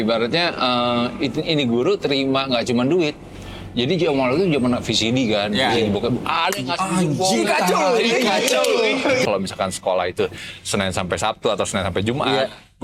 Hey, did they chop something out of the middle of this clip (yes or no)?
yes